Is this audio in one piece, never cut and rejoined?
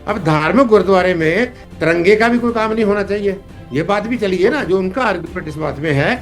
yes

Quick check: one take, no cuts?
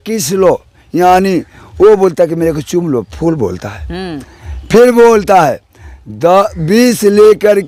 yes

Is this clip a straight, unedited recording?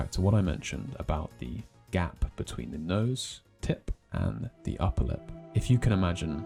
yes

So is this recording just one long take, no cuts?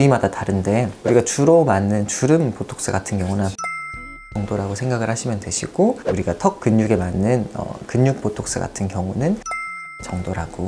yes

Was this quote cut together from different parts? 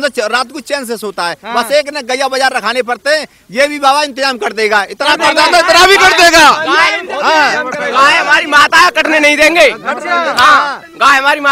no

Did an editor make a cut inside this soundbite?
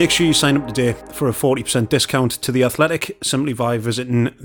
yes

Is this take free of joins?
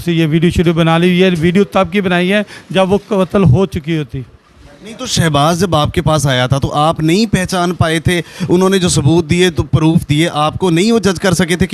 yes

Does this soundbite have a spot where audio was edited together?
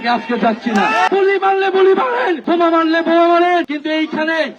yes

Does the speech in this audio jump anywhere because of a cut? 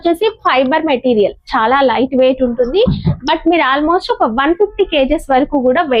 no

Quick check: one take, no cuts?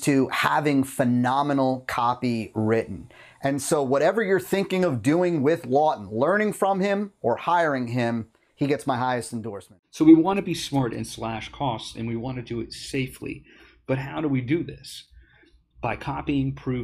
no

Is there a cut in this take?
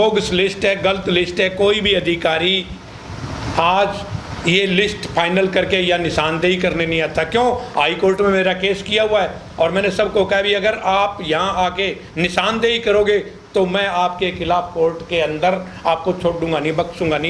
no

